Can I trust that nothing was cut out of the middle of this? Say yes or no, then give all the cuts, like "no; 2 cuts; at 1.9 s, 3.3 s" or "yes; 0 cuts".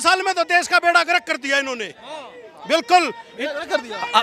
yes; 0 cuts